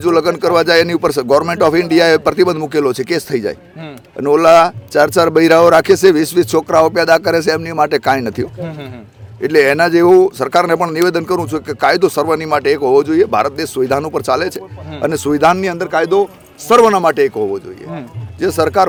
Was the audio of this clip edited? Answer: no; 0 cuts

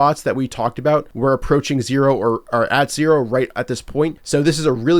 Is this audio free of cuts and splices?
no; 2 cuts; at 1.1 s, 4.2 s

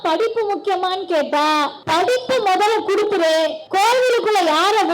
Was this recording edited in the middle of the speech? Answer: yes; 2 cuts; at 1.8 s, 3.6 s

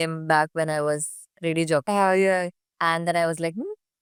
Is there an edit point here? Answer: no; 0 cuts

